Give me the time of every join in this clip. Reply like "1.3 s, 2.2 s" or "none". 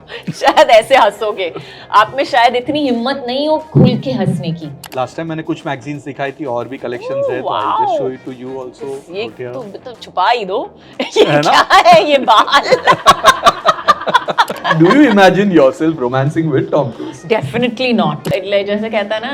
4.8 s, 14.6 s, 18.2 s